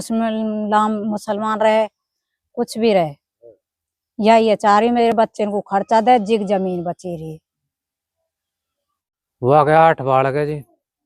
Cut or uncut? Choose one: uncut